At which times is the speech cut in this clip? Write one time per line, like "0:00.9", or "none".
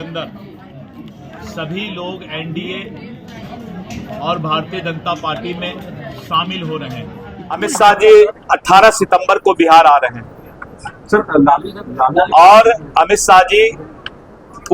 0:07.7